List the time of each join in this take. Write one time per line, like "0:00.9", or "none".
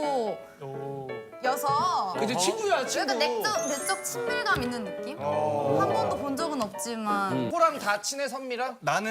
0:07.5